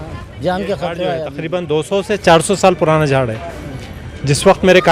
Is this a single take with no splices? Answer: no; 1 cut; at 1.4 s

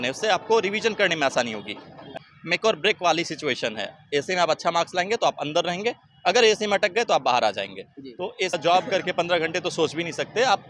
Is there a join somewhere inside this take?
yes; 2 cuts; at 2.1 s, 8.6 s

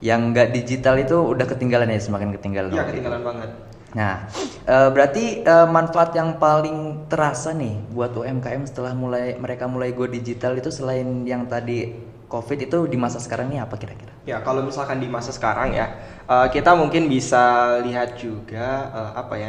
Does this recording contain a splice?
no; 0 cuts

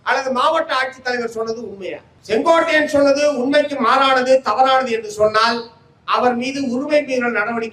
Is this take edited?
yes; 1 cut; at 2.1 s

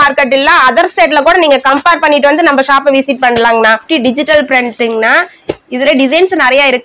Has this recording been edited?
yes; 1 cut; at 3.8 s

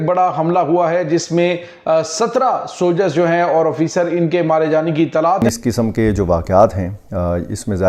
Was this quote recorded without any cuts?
no; 1 cut; at 5.4 s

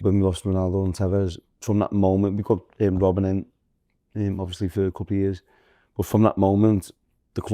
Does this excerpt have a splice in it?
yes; 1 cut; at 1.5 s

